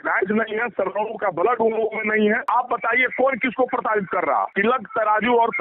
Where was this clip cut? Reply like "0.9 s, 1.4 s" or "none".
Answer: 2.4 s, 4.5 s